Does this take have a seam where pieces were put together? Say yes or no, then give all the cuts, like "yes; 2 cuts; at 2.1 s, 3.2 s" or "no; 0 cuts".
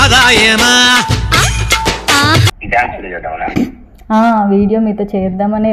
yes; 1 cut; at 2.6 s